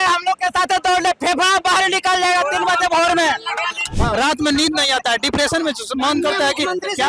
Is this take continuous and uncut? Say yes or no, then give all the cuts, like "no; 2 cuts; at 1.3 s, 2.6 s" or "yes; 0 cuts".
no; 1 cut; at 3.9 s